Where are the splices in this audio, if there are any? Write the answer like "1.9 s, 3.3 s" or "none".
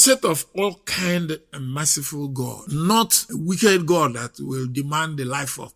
2.6 s, 3.2 s